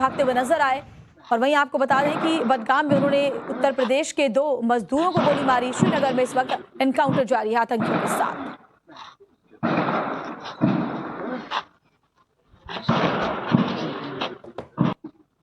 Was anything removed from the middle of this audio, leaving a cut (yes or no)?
yes